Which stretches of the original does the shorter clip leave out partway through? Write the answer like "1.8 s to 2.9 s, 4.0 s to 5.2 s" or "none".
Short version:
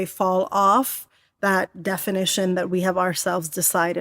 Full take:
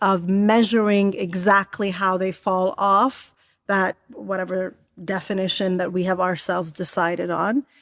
4.0 s to 5.0 s

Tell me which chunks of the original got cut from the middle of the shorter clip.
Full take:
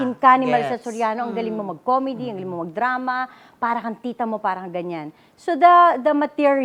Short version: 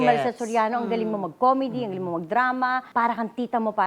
3.3 s to 3.5 s

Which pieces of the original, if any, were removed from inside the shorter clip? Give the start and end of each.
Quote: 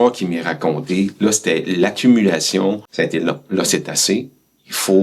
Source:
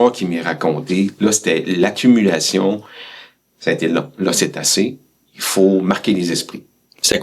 2.9 s to 3.5 s

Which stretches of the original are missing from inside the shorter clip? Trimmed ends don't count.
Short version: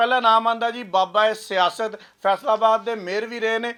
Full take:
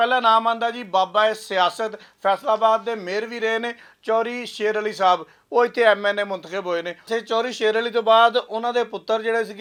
none

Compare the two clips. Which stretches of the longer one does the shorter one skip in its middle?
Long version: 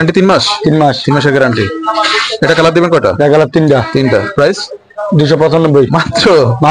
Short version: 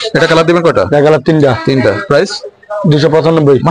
none

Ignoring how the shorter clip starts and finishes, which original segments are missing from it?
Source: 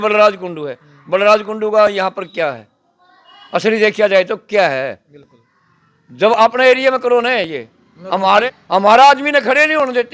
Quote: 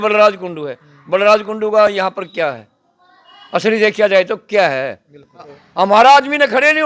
5.6 s to 8.6 s

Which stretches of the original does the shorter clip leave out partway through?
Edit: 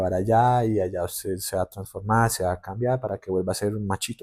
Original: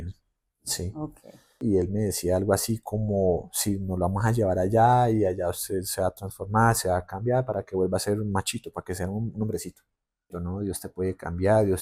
none

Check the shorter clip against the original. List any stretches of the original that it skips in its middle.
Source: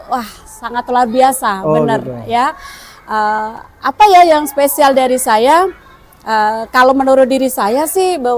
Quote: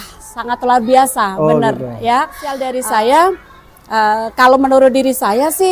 2.9 s to 5.0 s

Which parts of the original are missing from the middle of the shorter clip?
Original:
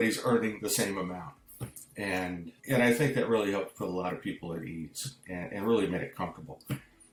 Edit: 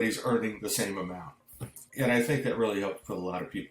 1.8 s to 2.5 s

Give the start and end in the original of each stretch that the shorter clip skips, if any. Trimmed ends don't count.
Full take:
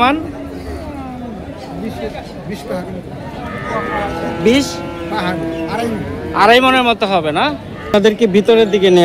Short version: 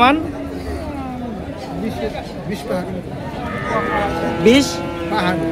none

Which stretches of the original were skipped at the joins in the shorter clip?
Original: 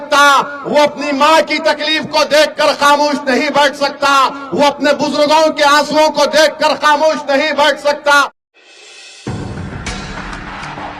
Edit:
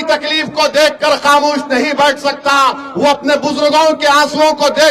none

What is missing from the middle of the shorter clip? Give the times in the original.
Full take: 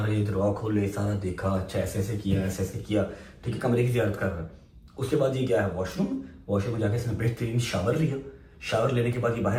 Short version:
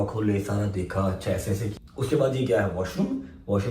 2.2 s to 4.7 s

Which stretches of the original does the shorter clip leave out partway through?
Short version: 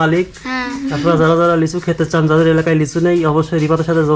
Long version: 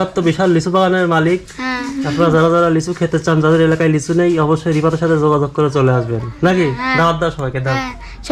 none

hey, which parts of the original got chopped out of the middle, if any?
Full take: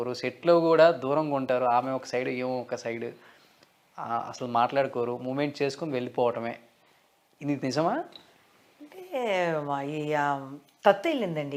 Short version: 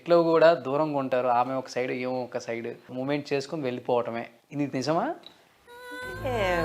3.3 s to 5.2 s, 6.7 s to 7.3 s

